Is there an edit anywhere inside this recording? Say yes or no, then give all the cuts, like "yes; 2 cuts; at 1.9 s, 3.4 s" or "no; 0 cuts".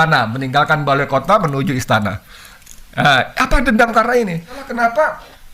yes; 1 cut; at 4.6 s